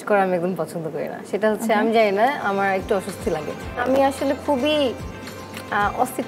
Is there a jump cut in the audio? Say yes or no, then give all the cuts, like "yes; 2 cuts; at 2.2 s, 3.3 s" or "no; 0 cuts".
yes; 1 cut; at 3.8 s